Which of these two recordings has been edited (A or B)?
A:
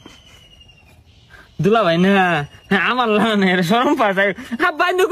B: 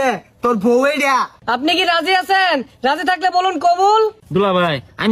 B